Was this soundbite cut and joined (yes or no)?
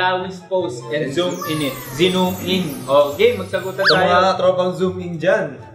no